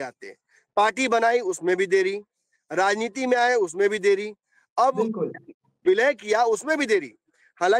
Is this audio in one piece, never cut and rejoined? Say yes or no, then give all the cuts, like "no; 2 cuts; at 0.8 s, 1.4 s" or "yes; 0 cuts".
yes; 0 cuts